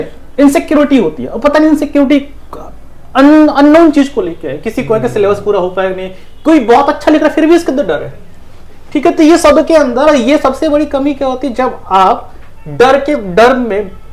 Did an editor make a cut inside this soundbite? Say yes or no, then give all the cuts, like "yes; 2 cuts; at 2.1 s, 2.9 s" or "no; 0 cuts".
no; 0 cuts